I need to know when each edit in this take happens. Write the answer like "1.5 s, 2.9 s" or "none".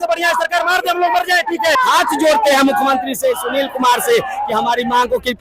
1.8 s